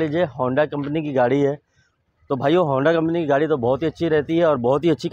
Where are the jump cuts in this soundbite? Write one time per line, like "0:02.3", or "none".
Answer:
none